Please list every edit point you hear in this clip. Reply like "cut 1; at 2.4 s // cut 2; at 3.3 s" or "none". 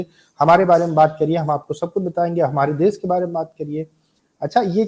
none

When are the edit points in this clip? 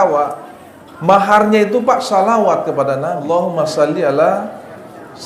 cut 1; at 3.2 s

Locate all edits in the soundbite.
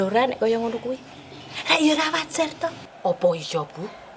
none

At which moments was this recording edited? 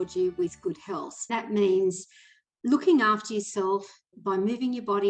cut 1; at 1.3 s // cut 2; at 4.1 s

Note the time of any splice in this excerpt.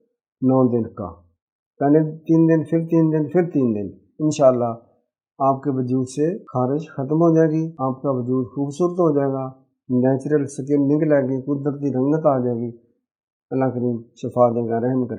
cut 1; at 6.4 s // cut 2; at 7.7 s

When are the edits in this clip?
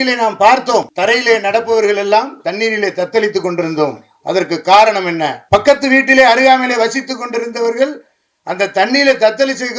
cut 1; at 0.9 s // cut 2; at 5.4 s

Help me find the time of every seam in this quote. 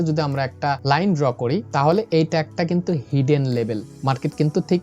cut 1; at 0.8 s // cut 2; at 1.7 s // cut 3; at 3.9 s

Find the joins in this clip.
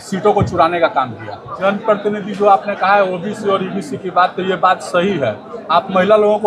cut 1; at 1.6 s

